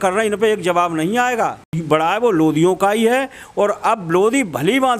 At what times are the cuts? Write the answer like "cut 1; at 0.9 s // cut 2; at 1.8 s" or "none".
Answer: cut 1; at 1.8 s